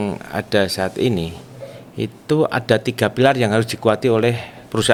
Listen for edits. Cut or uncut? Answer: uncut